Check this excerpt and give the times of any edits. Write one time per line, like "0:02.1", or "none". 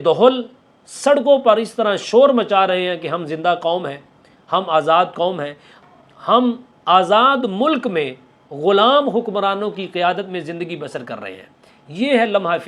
0:05.8